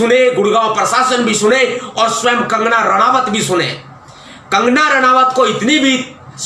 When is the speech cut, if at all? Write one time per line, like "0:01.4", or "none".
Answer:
none

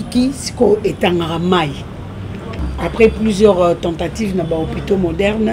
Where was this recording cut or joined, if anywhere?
0:02.6

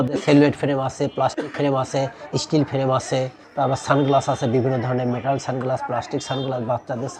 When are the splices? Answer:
none

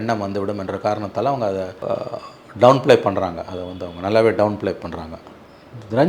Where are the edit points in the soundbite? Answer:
0:01.8

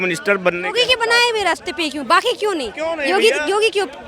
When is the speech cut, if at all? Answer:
none

